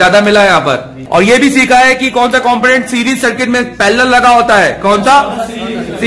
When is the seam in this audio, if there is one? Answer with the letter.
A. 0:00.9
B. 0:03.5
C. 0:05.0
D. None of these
A